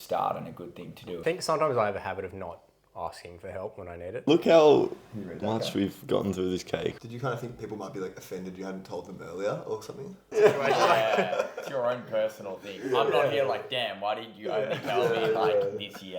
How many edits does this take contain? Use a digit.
4